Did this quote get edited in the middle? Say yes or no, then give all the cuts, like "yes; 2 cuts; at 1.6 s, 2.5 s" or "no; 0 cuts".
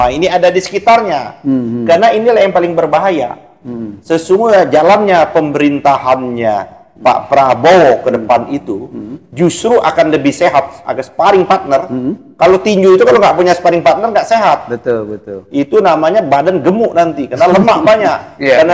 no; 0 cuts